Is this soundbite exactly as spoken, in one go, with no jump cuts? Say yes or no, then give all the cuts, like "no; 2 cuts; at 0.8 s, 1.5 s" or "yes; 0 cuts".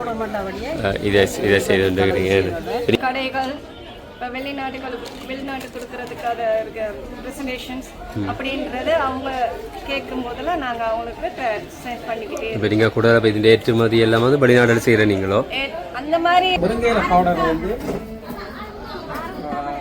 no; 2 cuts; at 3.0 s, 16.6 s